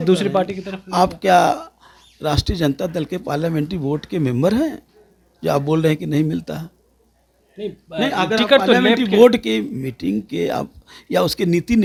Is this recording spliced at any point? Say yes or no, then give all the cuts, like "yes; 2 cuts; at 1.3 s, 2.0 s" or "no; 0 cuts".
no; 0 cuts